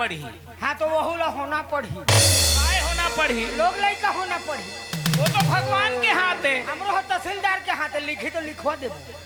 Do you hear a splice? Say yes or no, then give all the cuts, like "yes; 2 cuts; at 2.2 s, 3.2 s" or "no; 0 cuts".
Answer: no; 0 cuts